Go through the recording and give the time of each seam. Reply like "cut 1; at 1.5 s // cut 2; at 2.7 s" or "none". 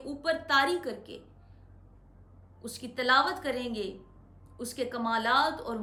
none